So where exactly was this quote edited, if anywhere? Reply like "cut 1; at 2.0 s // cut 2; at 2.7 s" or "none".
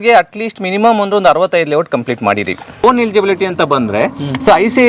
cut 1; at 2.8 s